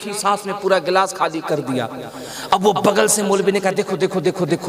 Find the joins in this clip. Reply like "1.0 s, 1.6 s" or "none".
none

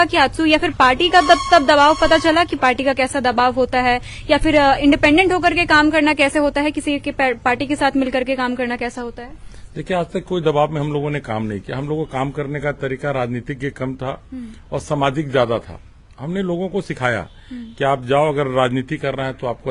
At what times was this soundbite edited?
none

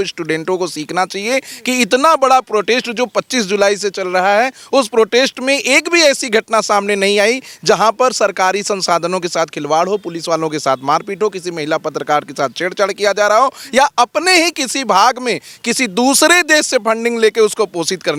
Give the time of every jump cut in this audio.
none

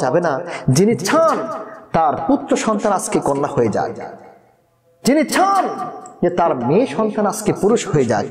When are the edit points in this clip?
none

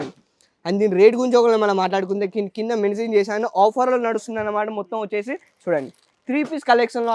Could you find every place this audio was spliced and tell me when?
none

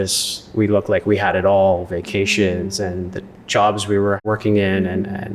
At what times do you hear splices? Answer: 4.2 s

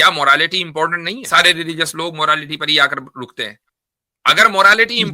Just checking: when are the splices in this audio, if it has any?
1.3 s

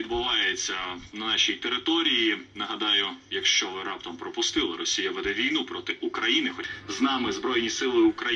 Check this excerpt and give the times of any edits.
6.7 s

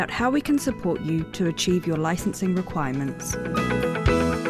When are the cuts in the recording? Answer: 3.3 s

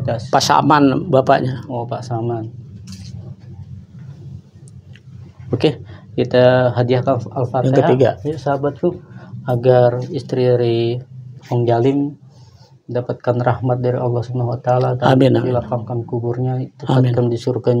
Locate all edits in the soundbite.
none

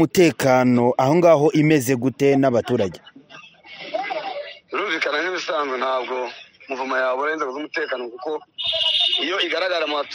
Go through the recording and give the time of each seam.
none

